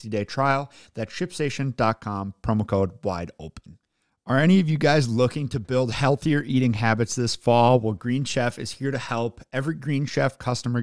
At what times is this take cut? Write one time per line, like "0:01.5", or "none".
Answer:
0:03.9